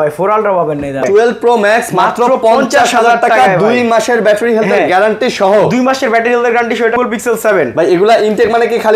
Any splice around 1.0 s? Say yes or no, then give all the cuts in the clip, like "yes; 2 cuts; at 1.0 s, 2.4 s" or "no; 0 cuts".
yes; 2 cuts; at 1.0 s, 7.0 s